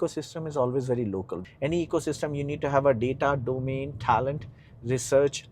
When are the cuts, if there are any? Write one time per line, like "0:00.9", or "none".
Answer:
0:01.4